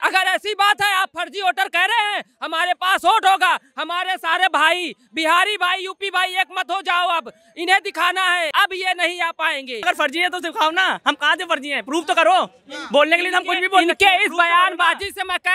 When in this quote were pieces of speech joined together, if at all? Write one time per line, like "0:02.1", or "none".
0:08.5
0:09.8